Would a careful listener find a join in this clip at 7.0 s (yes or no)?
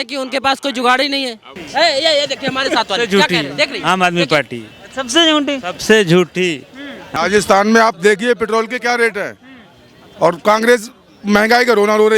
yes